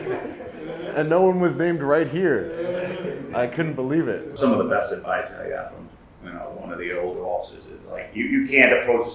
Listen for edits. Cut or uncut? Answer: cut